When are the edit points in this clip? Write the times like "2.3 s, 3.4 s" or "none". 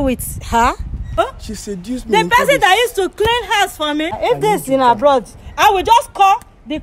1.2 s, 4.2 s

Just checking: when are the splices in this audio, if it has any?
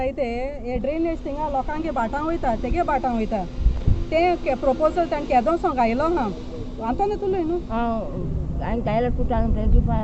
none

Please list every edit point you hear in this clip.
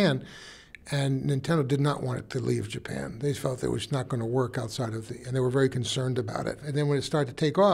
6.6 s

